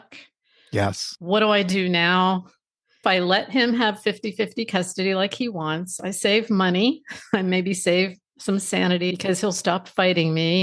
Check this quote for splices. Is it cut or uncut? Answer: cut